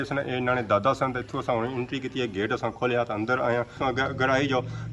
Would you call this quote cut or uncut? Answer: cut